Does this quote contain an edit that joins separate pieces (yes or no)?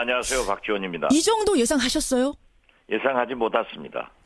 yes